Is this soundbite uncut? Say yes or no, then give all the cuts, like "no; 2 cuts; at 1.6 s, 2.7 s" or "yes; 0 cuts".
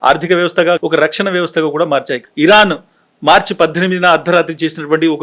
no; 2 cuts; at 0.8 s, 2.2 s